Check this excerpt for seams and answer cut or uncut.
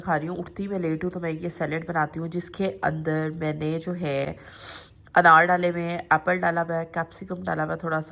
uncut